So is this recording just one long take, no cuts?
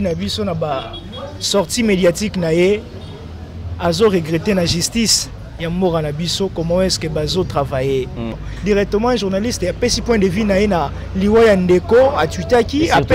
no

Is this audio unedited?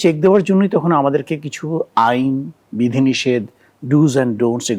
yes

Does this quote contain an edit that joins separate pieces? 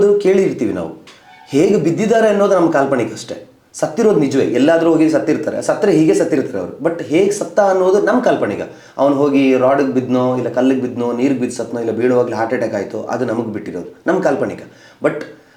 no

